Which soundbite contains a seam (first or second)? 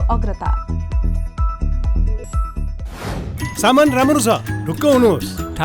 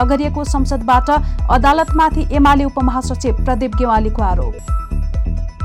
first